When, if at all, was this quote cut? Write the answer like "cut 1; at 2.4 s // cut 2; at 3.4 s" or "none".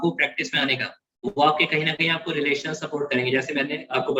none